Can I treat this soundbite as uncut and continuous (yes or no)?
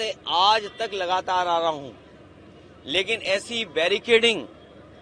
yes